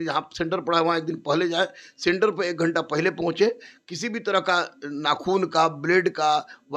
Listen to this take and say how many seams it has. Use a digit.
0